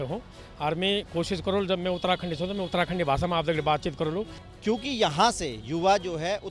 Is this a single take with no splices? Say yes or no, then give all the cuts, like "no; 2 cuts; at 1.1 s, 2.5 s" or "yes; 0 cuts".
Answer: no; 1 cut; at 4.4 s